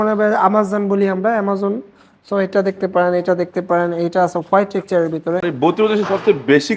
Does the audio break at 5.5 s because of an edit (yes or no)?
yes